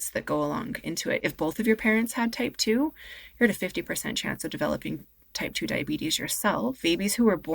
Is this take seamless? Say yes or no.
no